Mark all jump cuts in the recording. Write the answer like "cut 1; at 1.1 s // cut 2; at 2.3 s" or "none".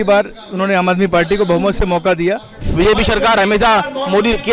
cut 1; at 2.7 s